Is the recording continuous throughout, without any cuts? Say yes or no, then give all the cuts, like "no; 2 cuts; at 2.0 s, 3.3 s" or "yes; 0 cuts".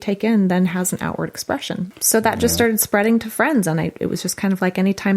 no; 1 cut; at 1.9 s